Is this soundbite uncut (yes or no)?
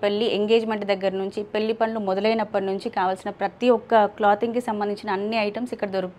yes